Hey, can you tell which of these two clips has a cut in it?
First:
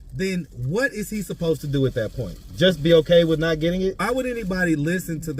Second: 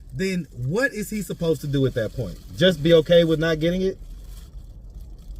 first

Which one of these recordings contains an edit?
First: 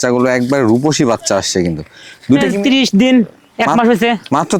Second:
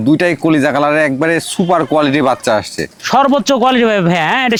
first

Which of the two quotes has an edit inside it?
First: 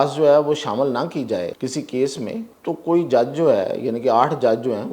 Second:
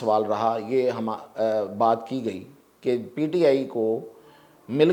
first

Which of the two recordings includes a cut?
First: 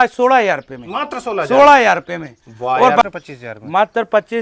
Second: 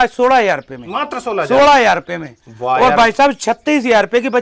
first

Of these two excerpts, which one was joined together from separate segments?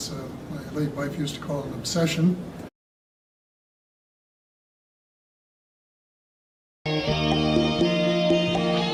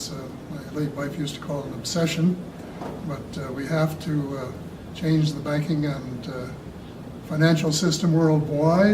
second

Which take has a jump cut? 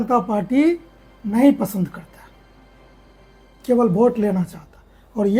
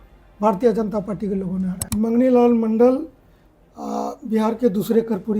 second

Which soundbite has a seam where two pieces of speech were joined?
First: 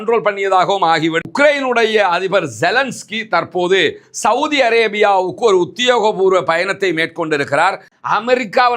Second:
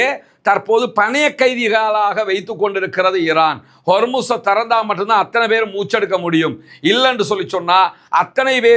first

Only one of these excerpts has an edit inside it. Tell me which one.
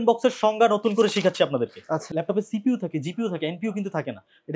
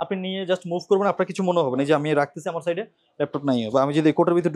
first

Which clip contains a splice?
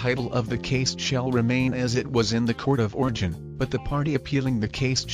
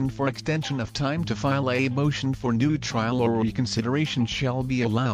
first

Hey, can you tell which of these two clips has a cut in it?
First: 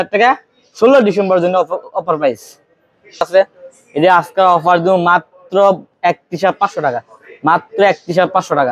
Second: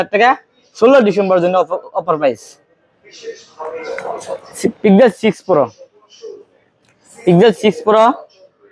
first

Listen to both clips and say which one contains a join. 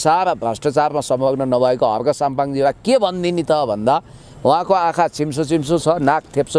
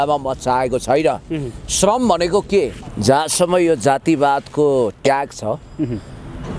second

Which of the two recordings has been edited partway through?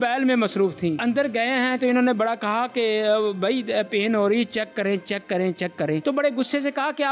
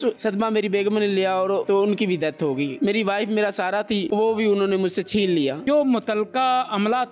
second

